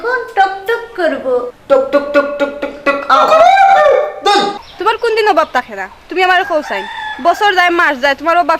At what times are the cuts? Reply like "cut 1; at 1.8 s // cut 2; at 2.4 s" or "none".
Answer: cut 1; at 1.5 s // cut 2; at 4.6 s